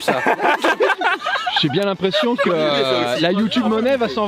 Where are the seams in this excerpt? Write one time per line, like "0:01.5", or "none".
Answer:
none